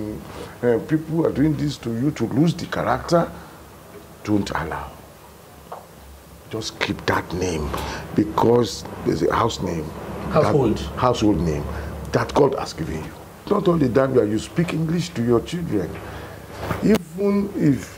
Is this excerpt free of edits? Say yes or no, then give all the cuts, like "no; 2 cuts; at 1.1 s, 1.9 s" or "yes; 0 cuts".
no; 1 cut; at 13.5 s